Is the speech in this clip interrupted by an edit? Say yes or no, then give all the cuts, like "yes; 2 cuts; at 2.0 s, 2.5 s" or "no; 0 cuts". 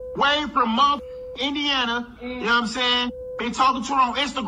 no; 0 cuts